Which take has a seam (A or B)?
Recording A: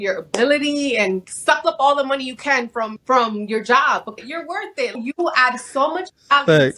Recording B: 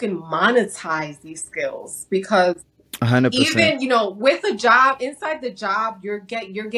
A